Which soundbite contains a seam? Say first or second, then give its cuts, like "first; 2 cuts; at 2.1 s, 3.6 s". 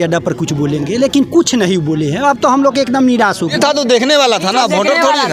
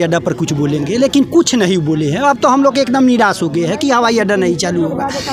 first; 1 cut; at 3.5 s